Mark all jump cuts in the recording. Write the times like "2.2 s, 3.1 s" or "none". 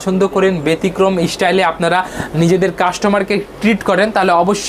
none